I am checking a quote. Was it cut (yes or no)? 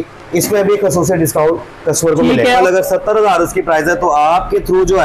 yes